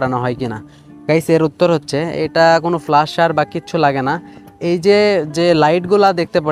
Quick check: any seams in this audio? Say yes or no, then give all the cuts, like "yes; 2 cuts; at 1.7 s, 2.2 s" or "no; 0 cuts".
no; 0 cuts